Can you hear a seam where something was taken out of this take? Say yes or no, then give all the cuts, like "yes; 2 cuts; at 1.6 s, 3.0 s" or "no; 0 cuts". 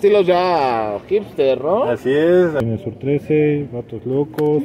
yes; 1 cut; at 2.6 s